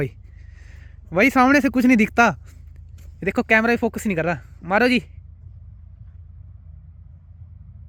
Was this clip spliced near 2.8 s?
no; 0 cuts

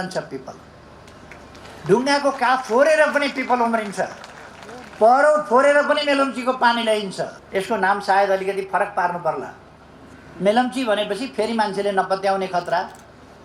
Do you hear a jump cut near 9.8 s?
no; 1 cut; at 7.4 s

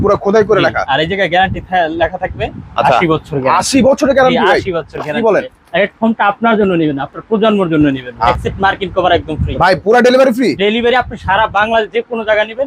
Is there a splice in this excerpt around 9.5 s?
yes; 2 cuts; at 8.3 s, 9.5 s

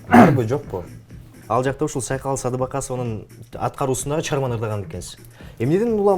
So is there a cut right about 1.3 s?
yes; 1 cut; at 1.3 s

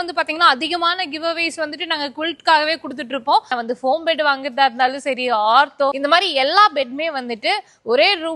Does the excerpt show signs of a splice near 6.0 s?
yes; 2 cuts; at 3.5 s, 6.0 s

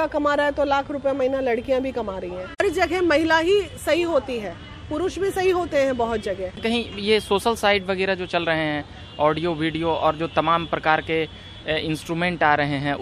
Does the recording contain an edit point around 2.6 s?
yes; 2 cuts; at 2.6 s, 6.6 s

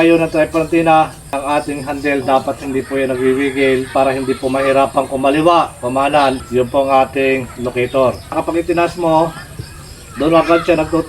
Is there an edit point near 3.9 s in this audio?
yes; 4 cuts; at 1.4 s, 3.9 s, 6.4 s, 8.4 s

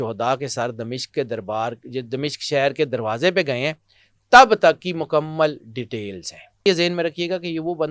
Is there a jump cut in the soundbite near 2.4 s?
no; 1 cut; at 6.7 s

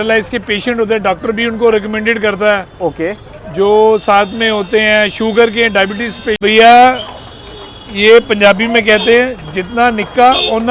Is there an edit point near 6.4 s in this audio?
yes; 1 cut; at 6.4 s

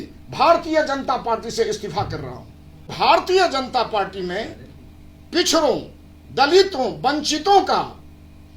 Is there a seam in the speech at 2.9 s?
yes; 1 cut; at 2.9 s

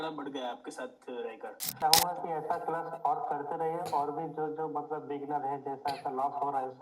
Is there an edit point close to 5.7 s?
no; 1 cut; at 1.8 s

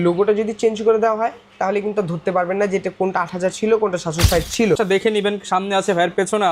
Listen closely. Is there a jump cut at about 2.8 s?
no; 1 cut; at 4.8 s

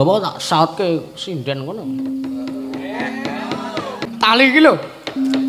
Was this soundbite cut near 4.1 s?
yes; 1 cut; at 4.1 s

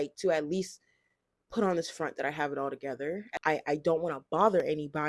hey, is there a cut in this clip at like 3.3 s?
yes; 1 cut; at 3.3 s

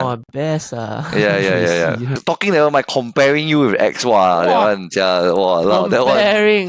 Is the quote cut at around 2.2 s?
yes; 1 cut; at 2.2 s

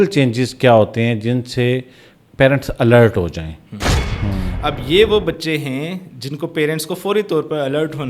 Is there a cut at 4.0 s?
yes; 1 cut; at 4.0 s

